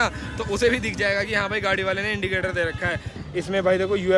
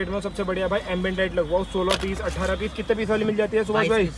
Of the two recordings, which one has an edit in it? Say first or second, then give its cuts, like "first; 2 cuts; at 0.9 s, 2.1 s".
first; 1 cut; at 3.1 s